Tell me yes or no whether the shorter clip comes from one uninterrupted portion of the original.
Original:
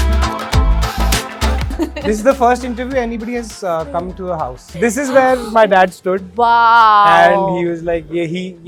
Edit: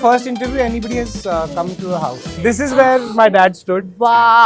yes